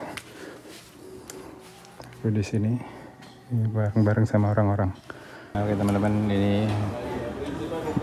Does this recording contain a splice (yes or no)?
yes